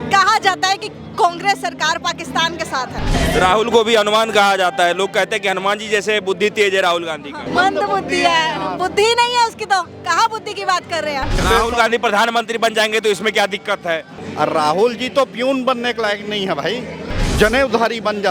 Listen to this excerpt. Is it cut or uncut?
cut